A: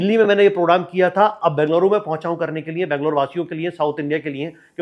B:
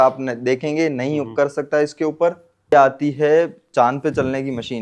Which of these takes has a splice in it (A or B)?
B